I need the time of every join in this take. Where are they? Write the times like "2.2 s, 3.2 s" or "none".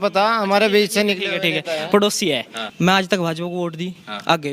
2.6 s